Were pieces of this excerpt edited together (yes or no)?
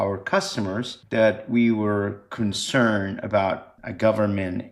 yes